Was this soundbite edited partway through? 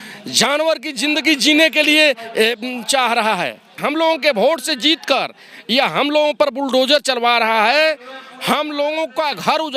yes; 1 cut; at 3.7 s

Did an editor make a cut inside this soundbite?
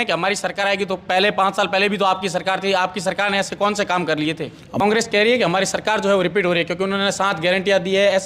yes; 1 cut; at 4.8 s

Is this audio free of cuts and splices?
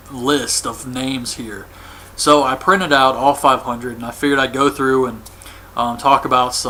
yes; 0 cuts

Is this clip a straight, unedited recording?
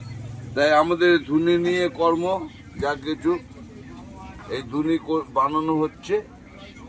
yes; 0 cuts

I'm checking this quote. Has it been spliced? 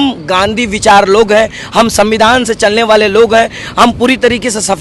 no; 0 cuts

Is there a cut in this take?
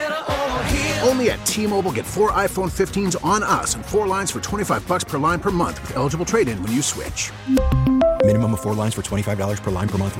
no; 0 cuts

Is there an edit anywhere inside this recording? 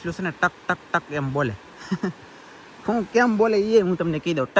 no; 0 cuts

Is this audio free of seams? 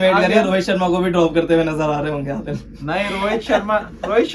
yes; 0 cuts

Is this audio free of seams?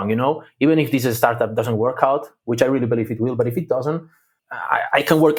yes; 0 cuts

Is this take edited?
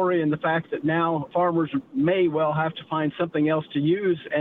yes; 1 cut; at 1.3 s

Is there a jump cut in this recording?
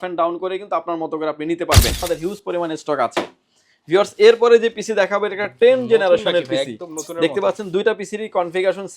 yes; 1 cut; at 2.0 s

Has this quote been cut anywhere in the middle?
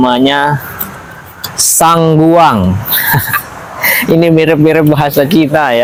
no; 0 cuts

